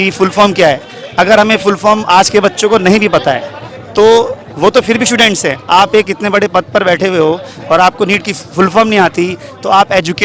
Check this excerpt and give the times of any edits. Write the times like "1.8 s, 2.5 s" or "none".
none